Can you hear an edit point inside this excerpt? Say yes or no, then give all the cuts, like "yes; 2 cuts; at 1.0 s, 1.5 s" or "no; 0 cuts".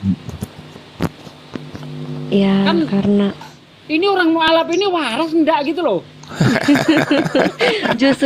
yes; 1 cut; at 3.4 s